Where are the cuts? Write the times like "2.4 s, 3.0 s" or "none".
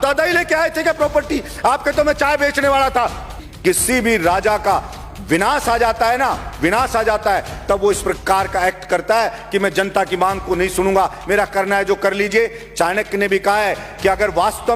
3.4 s